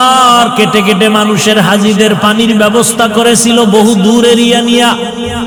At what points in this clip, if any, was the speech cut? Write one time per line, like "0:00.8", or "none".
none